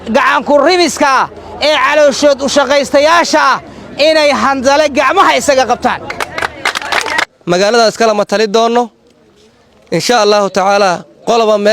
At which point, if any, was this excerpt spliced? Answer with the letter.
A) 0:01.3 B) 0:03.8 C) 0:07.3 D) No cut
C